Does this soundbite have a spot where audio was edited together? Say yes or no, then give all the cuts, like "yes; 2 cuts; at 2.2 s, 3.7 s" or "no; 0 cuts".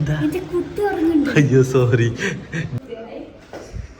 yes; 1 cut; at 2.7 s